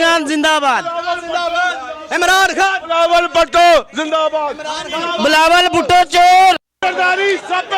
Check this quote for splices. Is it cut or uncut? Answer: cut